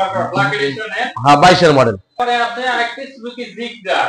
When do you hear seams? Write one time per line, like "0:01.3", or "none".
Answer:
0:02.1